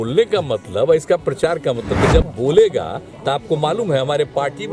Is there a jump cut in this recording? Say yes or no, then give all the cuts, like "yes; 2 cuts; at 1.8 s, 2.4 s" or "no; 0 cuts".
yes; 1 cut; at 2.1 s